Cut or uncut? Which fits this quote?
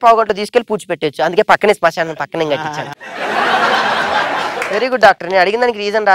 uncut